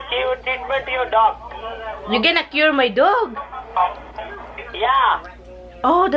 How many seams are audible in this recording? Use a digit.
0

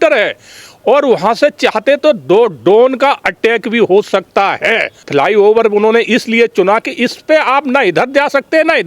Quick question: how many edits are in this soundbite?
1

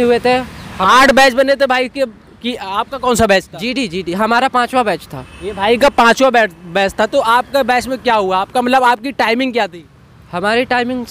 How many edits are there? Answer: 0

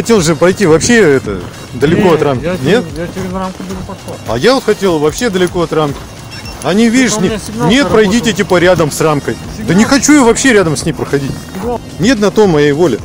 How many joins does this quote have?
1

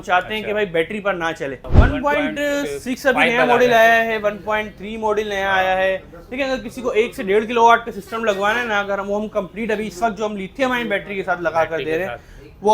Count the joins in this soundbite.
1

